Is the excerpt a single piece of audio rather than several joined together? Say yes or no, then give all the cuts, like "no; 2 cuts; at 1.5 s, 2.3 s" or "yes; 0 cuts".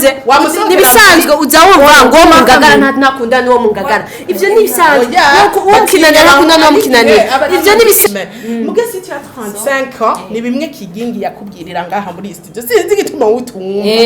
no; 1 cut; at 8.1 s